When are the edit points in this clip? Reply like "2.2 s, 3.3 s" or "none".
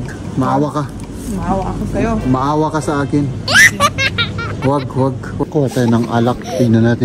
5.4 s